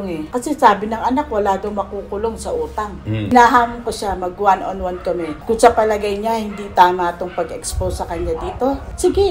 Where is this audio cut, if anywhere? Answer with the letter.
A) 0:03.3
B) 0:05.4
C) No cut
A